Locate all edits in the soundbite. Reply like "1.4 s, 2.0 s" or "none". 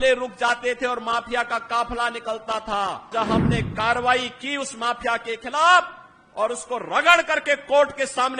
3.1 s